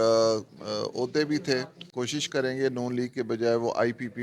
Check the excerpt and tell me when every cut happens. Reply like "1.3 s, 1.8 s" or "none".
2.2 s